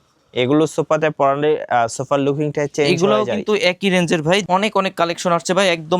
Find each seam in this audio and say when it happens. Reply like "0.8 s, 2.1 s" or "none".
4.4 s